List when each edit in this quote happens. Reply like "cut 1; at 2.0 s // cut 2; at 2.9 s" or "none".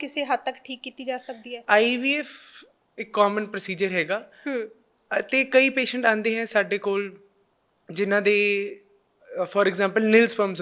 cut 1; at 1.6 s